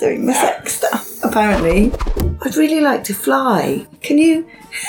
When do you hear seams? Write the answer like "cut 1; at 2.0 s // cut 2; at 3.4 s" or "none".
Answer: cut 1; at 2.1 s // cut 2; at 3.9 s